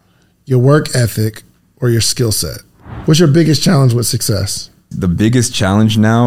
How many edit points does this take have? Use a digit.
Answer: 2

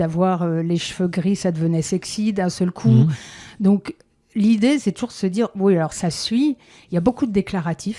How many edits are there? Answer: 0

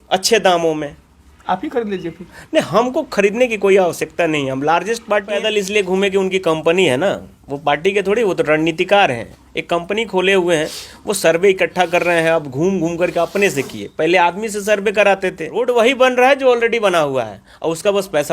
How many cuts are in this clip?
2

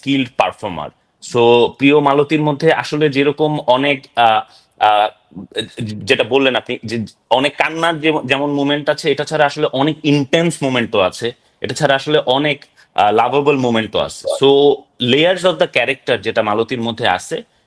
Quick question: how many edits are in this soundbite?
0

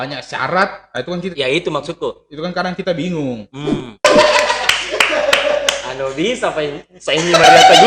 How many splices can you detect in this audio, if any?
1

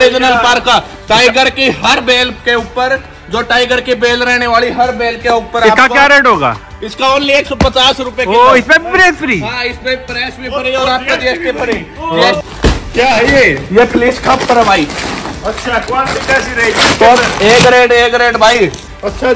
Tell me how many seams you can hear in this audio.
1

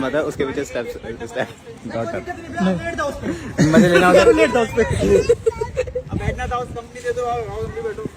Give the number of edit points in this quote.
0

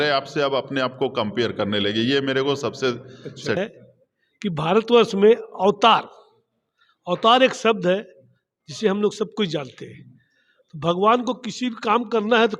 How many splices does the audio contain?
1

